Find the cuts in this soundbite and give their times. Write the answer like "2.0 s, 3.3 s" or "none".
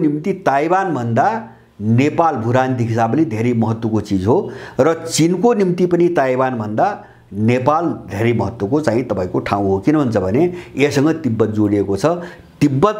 none